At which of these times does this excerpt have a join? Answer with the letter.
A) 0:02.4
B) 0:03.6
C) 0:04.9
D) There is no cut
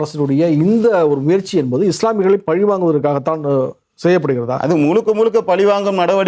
D